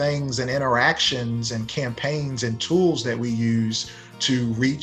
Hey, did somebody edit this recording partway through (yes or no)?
no